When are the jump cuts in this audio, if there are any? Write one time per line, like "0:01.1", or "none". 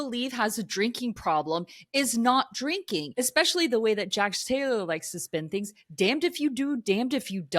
0:03.1